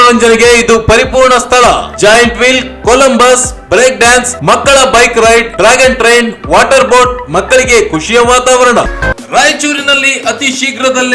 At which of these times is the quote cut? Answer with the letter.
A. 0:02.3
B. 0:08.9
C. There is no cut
B